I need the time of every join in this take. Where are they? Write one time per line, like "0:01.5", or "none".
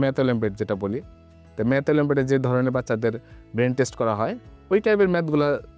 none